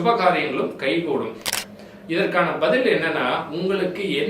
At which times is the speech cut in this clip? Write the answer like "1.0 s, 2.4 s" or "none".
1.4 s